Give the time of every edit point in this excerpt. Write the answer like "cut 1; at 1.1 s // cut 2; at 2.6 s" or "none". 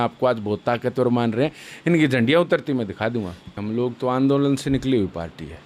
cut 1; at 3.5 s